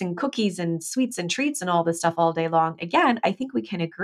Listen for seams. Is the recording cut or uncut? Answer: uncut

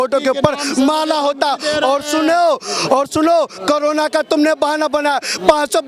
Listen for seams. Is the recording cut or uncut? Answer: uncut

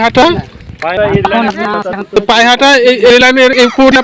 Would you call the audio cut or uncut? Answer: uncut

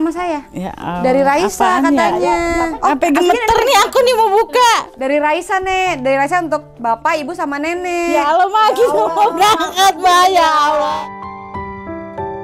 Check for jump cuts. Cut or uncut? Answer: cut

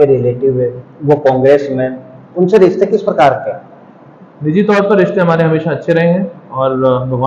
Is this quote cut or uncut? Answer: uncut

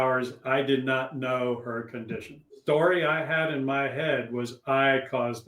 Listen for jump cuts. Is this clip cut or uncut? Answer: cut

